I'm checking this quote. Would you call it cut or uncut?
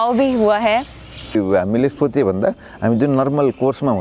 cut